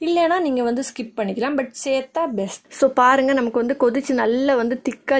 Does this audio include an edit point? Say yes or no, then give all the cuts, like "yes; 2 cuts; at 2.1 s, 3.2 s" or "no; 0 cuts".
yes; 1 cut; at 2.6 s